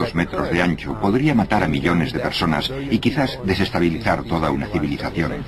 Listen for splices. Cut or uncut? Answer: cut